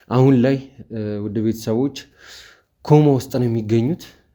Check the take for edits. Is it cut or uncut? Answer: uncut